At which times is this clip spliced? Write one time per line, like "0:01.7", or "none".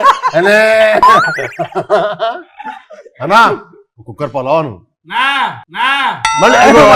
none